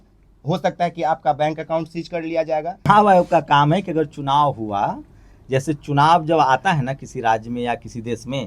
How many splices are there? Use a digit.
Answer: 1